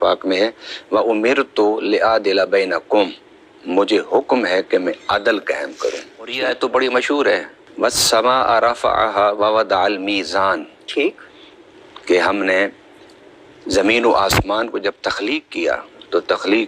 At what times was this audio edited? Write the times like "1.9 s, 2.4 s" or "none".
6.4 s